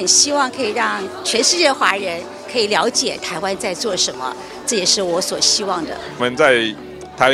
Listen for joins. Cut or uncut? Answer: cut